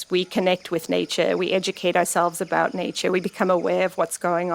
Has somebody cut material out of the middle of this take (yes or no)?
no